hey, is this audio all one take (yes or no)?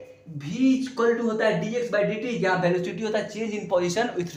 yes